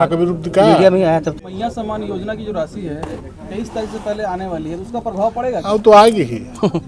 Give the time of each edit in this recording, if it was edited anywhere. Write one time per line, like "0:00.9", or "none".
0:01.6